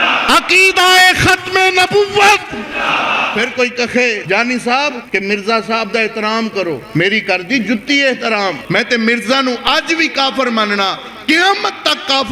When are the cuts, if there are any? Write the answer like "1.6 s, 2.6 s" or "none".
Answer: 3.3 s, 4.2 s, 5.0 s, 6.8 s, 8.6 s